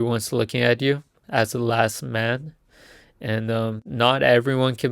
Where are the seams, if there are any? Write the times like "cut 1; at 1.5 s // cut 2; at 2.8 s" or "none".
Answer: cut 1; at 1.2 s // cut 2; at 3.8 s